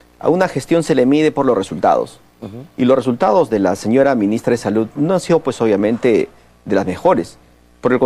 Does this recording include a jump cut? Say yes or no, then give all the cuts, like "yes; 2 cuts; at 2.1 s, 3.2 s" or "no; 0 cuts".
yes; 1 cut; at 2.8 s